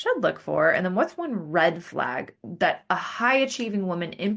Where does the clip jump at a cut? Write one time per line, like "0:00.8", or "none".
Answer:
none